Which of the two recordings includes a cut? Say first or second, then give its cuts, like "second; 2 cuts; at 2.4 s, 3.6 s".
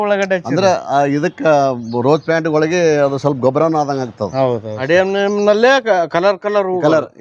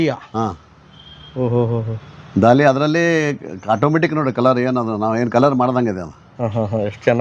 first; 1 cut; at 4.7 s